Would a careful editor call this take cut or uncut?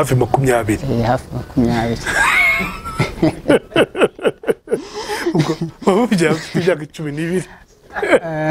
uncut